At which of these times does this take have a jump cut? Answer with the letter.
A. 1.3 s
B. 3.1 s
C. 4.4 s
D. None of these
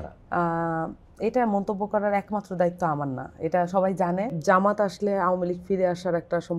C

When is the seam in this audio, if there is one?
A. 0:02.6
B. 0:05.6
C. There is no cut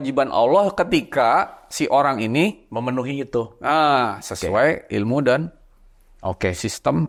C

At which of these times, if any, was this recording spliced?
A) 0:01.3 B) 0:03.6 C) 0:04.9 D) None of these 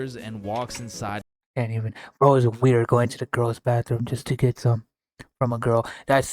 A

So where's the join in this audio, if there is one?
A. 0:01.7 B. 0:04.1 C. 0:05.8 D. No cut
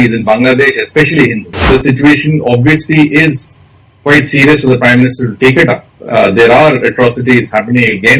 A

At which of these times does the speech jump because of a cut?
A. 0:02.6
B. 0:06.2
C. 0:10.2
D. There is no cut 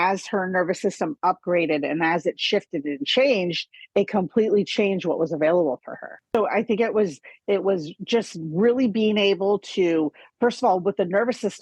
B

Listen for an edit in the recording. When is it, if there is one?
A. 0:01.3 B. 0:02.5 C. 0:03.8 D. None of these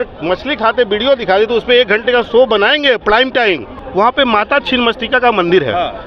C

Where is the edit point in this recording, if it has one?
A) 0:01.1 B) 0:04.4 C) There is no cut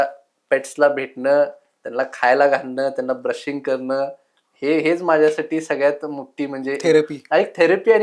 C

